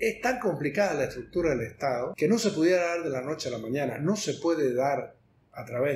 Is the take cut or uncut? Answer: cut